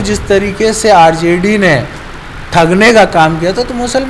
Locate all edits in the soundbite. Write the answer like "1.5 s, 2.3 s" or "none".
none

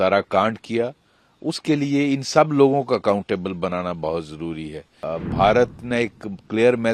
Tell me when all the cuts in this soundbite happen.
5.1 s

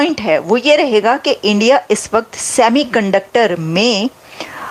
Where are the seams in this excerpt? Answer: none

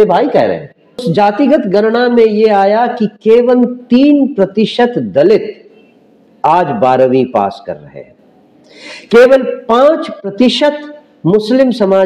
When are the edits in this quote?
1.0 s

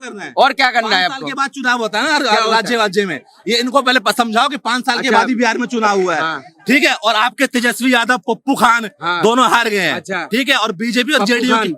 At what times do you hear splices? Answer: none

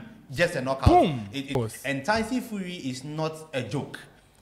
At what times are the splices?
1.6 s

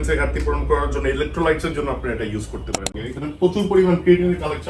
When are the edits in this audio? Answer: 3.0 s

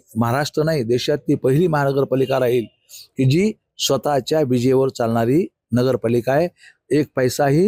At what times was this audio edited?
none

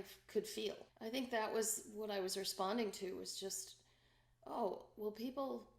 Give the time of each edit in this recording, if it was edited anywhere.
0.9 s

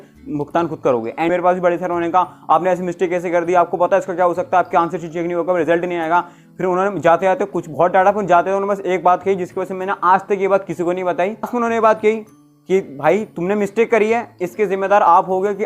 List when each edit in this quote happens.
1.3 s, 11.5 s

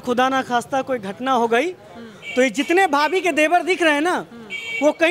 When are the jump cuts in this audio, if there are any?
none

